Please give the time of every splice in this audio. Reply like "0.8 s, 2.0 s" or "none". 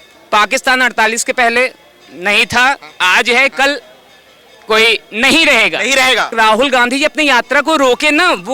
6.3 s